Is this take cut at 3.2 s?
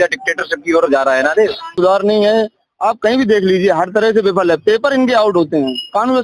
no; 1 cut; at 1.8 s

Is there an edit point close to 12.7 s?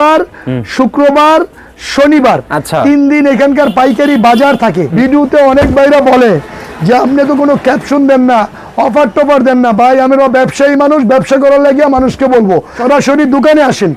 yes; 2 cuts; at 4.8 s, 12.7 s

